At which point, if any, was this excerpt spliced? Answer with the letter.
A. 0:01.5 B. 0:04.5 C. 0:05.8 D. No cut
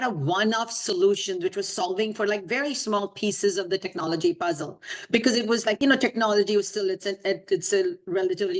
C